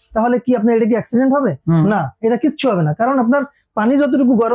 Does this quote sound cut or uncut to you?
uncut